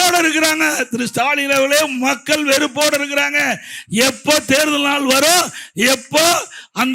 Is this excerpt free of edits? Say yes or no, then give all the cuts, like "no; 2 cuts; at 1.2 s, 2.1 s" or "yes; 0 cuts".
yes; 0 cuts